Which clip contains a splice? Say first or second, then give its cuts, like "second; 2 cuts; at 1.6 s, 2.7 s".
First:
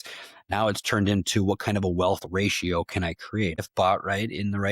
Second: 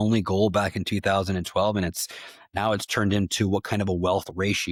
first; 1 cut; at 3.6 s